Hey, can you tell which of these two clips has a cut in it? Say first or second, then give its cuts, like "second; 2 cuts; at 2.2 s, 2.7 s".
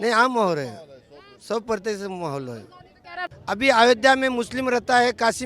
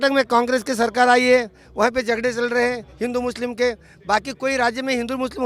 first; 1 cut; at 3.1 s